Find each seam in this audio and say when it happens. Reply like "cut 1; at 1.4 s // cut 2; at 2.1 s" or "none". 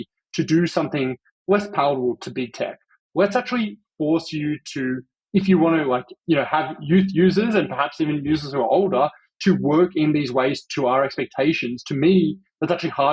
cut 1; at 1.3 s // cut 2; at 3.0 s